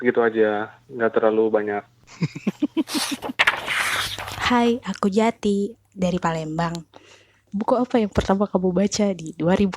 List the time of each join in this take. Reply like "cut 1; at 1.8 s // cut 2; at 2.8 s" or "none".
cut 1; at 3.7 s